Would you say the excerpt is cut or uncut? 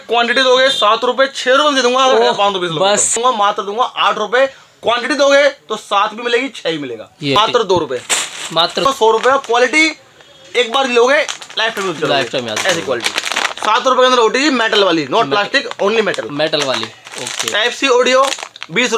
cut